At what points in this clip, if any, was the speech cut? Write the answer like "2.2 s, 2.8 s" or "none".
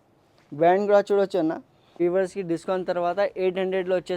2.0 s